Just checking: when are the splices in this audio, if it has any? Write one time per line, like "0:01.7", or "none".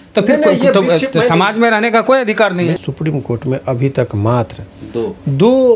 0:02.8